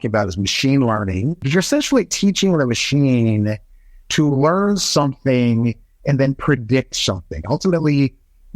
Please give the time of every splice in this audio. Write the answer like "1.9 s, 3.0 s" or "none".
1.4 s